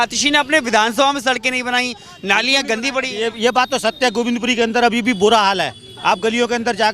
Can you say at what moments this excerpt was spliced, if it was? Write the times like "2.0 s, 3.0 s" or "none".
none